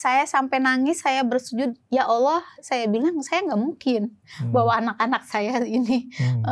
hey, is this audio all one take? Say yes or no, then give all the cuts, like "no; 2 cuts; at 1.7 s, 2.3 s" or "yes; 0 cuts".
yes; 0 cuts